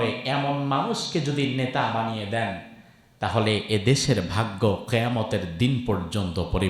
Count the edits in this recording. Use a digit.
0